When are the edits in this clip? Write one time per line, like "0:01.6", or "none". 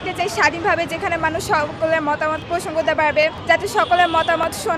0:02.4
0:03.4

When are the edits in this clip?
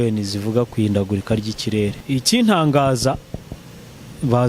0:02.0

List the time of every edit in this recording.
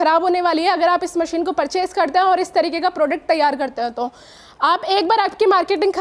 none

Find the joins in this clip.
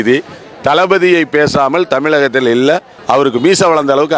0:02.9

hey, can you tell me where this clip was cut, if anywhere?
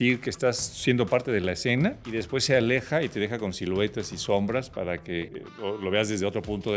0:02.0
0:05.2

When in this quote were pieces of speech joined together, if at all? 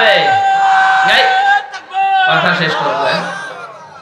none

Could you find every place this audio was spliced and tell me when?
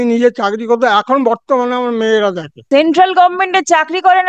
0:02.6

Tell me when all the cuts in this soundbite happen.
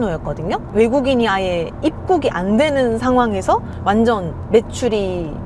0:03.7

